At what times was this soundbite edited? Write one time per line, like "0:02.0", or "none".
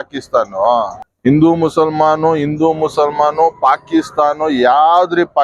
0:01.0